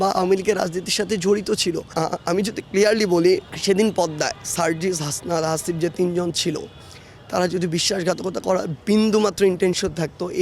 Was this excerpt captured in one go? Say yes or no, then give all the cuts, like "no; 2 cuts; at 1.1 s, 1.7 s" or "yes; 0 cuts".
no; 2 cuts; at 1.9 s, 3.5 s